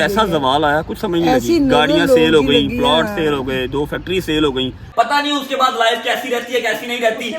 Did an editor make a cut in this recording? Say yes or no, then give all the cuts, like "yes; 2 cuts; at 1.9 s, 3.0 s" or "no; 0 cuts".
yes; 1 cut; at 4.8 s